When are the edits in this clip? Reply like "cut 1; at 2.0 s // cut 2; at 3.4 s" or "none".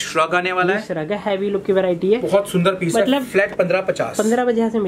none